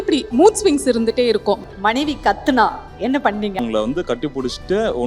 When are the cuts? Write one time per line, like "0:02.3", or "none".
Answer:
0:01.7
0:03.6